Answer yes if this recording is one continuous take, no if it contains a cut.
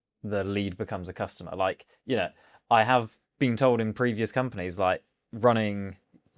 yes